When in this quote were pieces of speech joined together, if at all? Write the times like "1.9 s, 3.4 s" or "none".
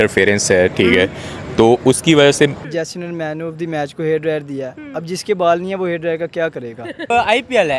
2.7 s, 7.1 s